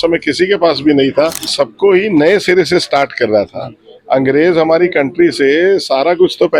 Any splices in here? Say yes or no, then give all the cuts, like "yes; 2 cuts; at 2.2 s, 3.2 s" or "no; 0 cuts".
yes; 1 cut; at 1.5 s